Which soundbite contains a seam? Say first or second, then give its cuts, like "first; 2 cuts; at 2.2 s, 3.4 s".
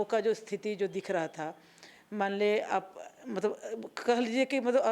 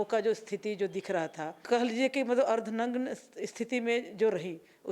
second; 1 cut; at 1.6 s